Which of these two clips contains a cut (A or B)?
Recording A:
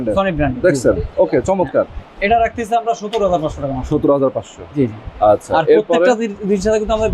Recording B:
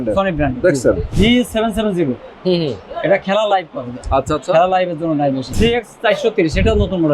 B